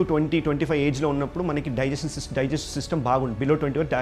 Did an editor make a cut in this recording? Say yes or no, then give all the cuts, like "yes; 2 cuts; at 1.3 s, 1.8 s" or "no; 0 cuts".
no; 0 cuts